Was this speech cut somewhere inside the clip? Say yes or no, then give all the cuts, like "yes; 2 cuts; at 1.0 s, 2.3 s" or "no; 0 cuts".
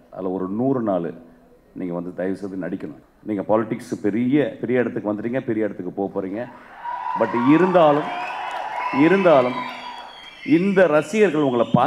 yes; 1 cut; at 3.1 s